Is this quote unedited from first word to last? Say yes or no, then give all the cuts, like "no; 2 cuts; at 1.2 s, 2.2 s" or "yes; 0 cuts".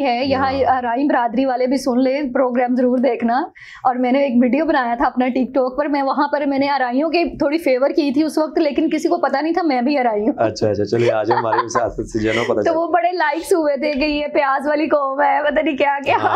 yes; 0 cuts